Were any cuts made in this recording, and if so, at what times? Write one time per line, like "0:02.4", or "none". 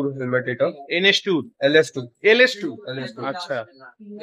none